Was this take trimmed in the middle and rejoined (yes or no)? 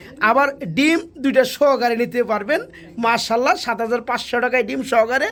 no